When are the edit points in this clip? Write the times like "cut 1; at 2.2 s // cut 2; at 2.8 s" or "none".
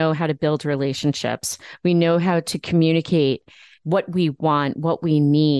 none